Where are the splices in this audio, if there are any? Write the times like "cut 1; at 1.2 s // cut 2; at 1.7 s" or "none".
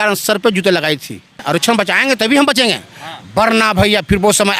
cut 1; at 1.4 s